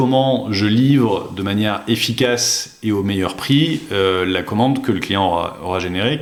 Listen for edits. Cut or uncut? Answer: uncut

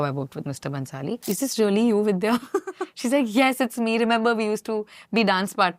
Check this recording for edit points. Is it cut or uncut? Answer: cut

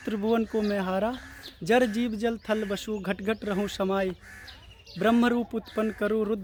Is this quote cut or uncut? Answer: uncut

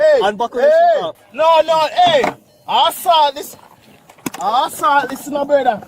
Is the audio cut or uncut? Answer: cut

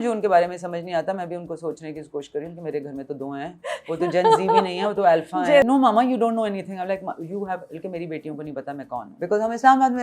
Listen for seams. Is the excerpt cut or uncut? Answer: cut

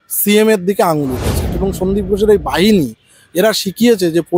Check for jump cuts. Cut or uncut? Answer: cut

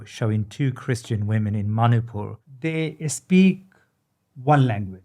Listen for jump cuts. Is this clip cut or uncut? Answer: cut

